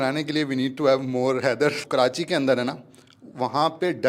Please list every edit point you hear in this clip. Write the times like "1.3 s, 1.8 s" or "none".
1.8 s